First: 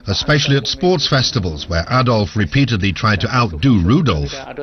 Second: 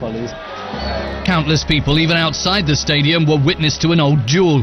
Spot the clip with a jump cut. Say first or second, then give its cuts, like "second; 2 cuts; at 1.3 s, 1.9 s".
second; 1 cut; at 2.7 s